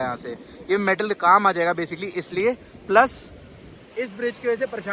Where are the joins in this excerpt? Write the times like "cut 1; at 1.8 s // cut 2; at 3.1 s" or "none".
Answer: none